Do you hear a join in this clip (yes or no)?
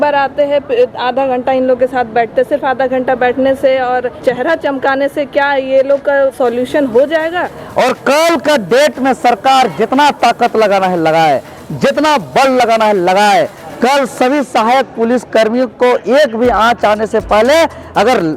yes